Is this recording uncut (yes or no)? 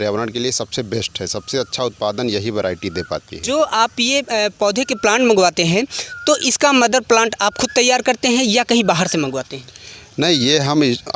yes